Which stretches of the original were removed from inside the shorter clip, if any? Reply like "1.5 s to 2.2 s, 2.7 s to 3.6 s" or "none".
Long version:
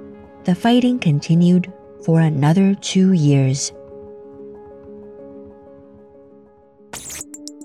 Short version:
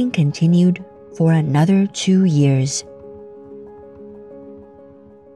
none